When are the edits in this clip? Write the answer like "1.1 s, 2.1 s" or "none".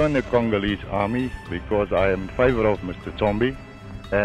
none

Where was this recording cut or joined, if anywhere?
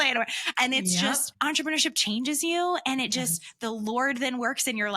1.3 s

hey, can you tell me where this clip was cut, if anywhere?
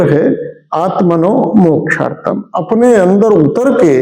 none

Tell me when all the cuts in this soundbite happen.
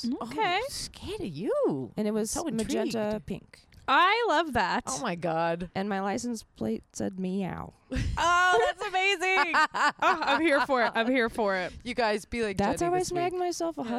none

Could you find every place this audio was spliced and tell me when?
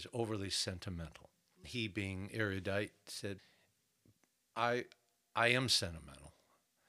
1.6 s, 3.4 s

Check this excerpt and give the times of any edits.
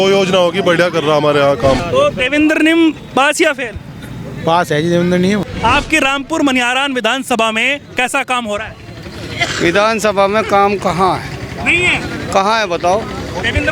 1.8 s, 5.5 s

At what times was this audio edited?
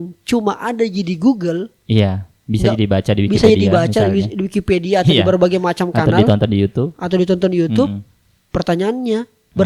none

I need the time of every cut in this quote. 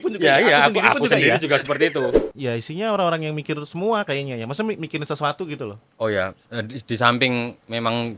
2.2 s

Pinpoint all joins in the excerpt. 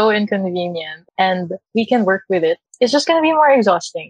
0.9 s, 1.6 s, 2.7 s

